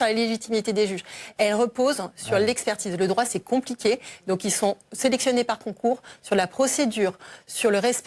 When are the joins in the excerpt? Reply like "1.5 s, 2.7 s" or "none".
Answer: 0.9 s